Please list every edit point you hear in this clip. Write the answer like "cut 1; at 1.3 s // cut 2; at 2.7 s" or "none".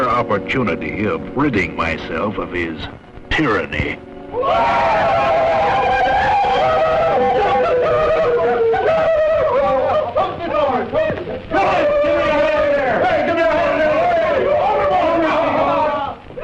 cut 1; at 4.4 s